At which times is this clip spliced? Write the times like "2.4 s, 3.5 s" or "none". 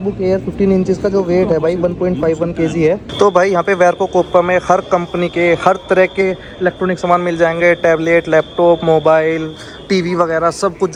none